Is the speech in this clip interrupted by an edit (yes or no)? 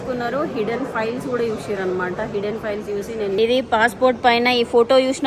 yes